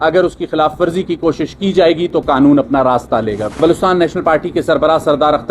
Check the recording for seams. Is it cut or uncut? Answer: cut